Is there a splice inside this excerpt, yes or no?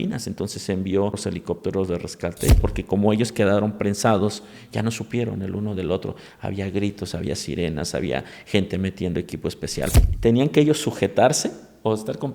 yes